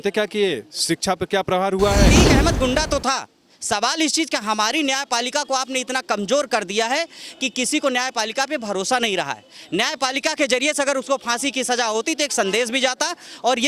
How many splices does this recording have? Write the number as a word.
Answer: one